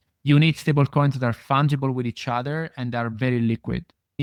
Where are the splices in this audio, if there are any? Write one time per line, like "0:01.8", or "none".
none